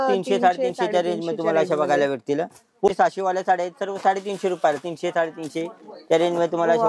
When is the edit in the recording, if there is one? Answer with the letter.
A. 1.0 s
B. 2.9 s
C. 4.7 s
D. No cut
B